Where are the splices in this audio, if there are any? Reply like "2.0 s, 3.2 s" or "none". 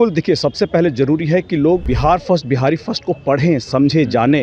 1.9 s